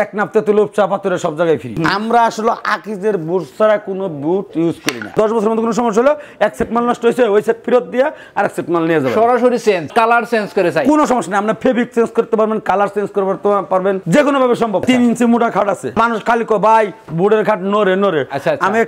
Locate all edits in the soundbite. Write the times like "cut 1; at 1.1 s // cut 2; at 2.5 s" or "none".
cut 1; at 1.7 s // cut 2; at 5.1 s // cut 3; at 9.9 s // cut 4; at 14.8 s // cut 5; at 15.9 s